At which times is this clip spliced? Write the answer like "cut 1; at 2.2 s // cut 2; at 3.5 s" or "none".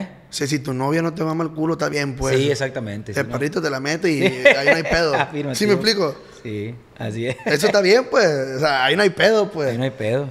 none